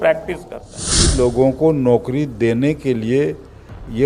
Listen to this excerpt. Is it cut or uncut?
cut